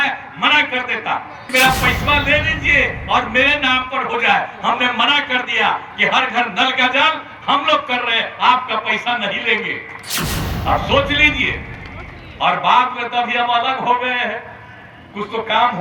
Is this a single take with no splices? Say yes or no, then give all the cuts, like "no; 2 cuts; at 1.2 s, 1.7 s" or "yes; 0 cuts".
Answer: no; 1 cut; at 1.4 s